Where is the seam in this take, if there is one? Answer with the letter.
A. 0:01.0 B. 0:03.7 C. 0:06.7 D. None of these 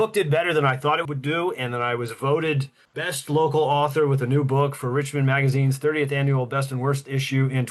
A